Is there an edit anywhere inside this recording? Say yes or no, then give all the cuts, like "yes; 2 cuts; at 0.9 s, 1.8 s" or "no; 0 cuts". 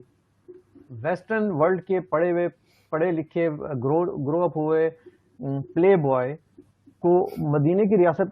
no; 0 cuts